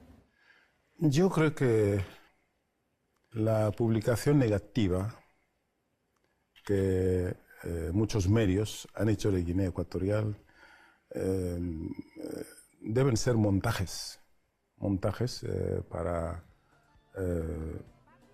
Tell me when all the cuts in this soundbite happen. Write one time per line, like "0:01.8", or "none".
0:04.8